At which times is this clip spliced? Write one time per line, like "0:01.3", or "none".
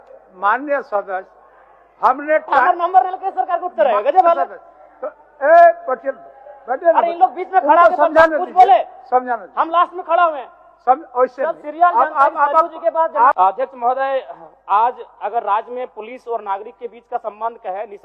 0:13.4